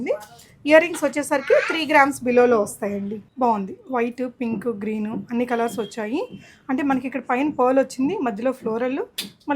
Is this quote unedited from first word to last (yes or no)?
no